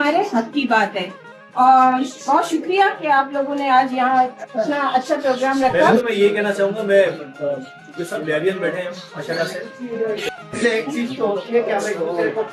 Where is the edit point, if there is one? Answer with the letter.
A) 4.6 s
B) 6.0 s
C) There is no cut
B